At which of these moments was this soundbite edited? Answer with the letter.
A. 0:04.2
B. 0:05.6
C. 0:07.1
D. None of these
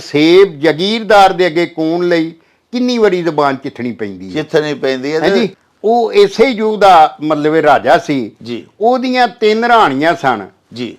B